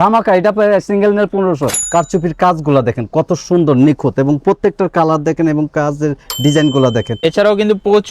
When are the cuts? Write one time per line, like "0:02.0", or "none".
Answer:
0:01.8
0:07.2